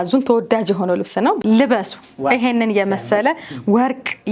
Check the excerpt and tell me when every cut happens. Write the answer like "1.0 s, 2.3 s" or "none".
1.4 s